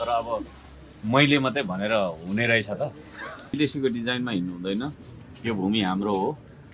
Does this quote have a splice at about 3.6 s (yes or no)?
yes